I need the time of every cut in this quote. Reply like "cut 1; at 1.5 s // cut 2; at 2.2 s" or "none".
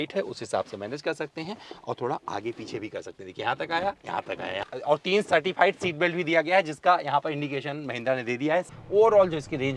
cut 1; at 4.6 s // cut 2; at 8.8 s